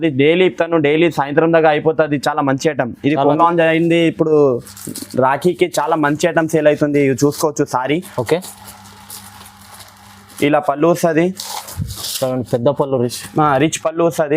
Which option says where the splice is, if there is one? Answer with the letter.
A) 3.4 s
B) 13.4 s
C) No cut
A